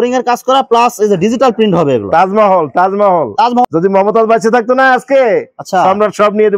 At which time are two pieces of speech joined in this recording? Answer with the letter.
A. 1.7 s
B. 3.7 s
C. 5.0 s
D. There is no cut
B